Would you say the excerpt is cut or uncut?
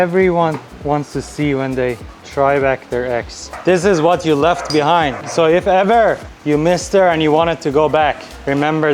uncut